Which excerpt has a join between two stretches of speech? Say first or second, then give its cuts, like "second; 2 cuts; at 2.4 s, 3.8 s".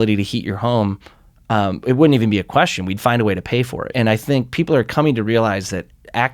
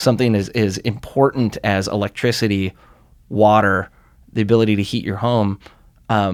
first; 1 cut; at 3.9 s